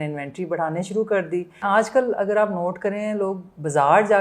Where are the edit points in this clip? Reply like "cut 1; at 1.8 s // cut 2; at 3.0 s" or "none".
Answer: cut 1; at 1.6 s